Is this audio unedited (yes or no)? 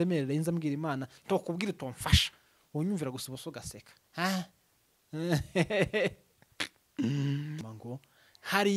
no